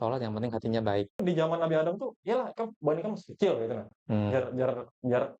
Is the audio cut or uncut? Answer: cut